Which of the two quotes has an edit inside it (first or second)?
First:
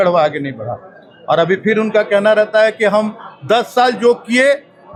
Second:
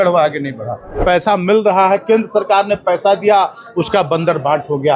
second